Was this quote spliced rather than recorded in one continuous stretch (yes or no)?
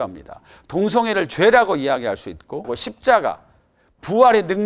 yes